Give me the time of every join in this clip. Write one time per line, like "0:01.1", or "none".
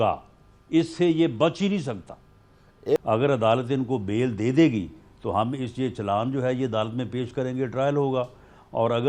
0:03.0